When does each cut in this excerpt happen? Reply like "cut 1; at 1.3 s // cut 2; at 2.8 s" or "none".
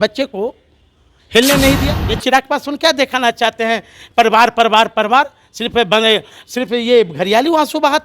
cut 1; at 1.8 s